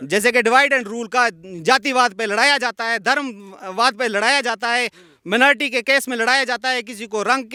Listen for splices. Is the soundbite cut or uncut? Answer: uncut